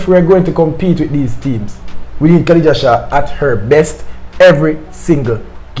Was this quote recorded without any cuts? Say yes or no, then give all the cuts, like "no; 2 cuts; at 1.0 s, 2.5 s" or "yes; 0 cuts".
yes; 0 cuts